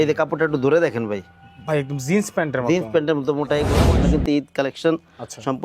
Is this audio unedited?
no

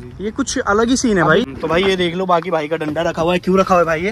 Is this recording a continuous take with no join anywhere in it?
no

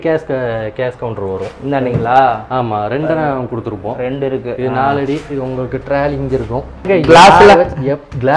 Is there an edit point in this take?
yes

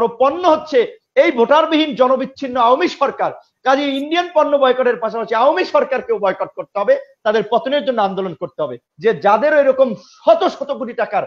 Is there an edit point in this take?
yes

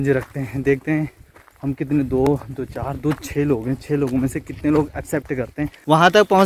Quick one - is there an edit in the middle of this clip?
no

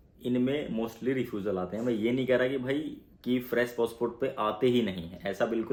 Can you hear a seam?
no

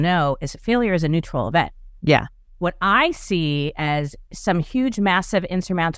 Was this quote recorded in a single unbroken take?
no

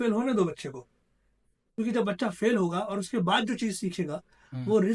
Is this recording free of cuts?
yes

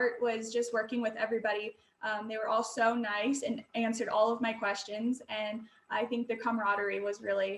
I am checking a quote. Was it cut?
no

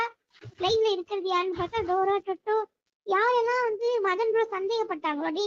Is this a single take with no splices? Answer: yes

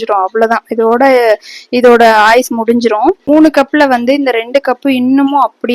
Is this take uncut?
no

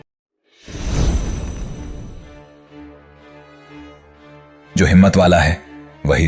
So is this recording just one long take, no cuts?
yes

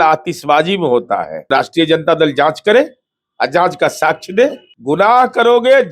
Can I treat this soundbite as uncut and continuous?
no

